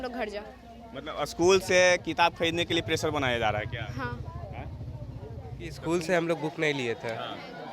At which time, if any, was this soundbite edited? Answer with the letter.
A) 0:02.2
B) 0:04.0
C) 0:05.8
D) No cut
C